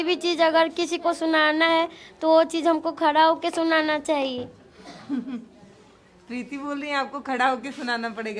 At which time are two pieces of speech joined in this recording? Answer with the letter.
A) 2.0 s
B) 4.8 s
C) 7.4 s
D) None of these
D